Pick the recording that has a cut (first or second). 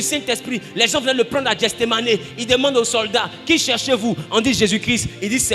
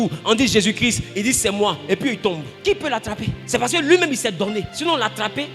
second